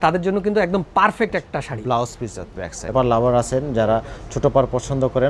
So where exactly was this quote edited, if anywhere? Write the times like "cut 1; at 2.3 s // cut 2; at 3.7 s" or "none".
cut 1; at 2.9 s